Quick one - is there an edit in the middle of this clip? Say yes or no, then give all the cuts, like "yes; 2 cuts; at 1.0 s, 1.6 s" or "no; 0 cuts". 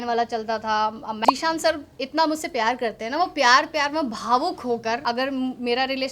yes; 2 cuts; at 1.2 s, 5.0 s